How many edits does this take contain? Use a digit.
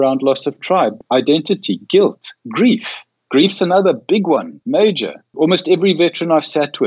3